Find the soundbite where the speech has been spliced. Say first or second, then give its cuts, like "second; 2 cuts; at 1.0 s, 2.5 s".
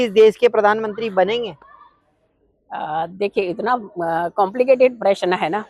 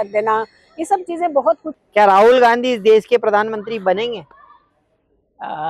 second; 1 cut; at 1.7 s